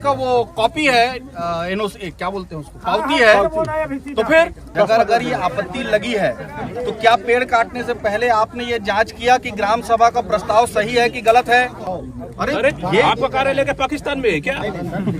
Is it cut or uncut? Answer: cut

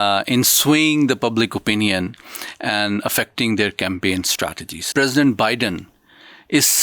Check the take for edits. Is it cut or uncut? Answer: cut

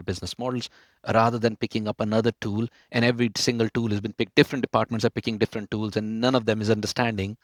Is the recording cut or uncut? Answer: uncut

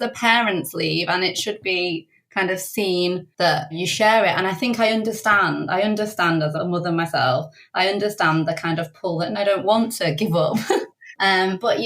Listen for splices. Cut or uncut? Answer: cut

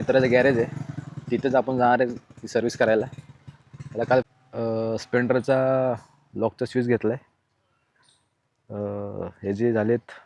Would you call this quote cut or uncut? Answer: cut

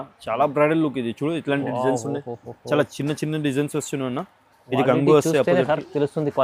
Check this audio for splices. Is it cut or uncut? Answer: uncut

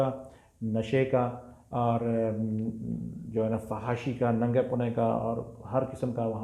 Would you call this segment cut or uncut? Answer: uncut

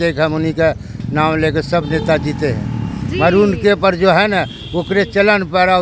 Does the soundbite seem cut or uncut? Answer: uncut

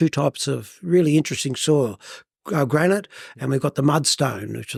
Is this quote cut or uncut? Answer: uncut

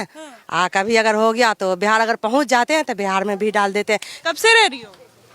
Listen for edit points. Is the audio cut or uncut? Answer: cut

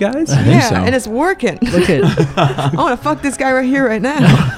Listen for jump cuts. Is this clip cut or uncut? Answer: uncut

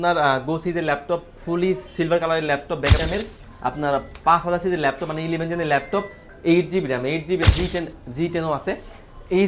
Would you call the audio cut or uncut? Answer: cut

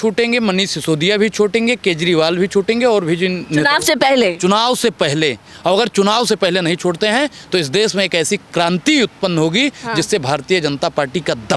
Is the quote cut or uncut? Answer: uncut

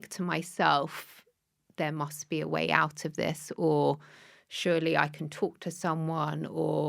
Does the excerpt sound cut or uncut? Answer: uncut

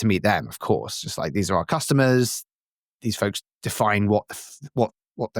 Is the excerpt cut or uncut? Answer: uncut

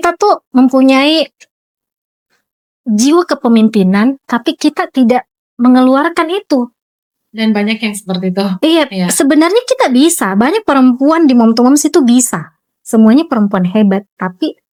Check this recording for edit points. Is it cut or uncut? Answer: uncut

